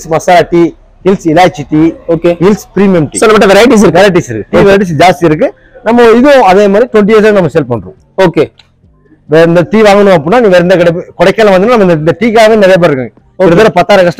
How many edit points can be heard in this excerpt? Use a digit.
0